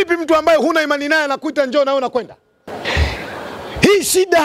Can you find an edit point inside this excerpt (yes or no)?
yes